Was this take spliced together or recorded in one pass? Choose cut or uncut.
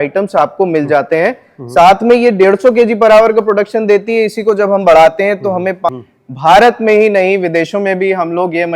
cut